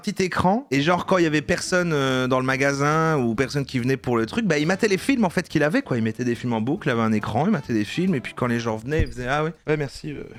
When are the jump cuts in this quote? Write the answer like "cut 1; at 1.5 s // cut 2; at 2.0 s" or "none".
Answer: none

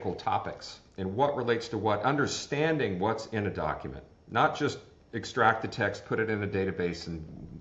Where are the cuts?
none

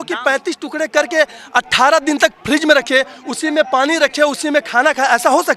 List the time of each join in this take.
none

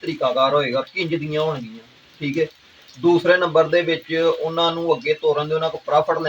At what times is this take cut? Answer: none

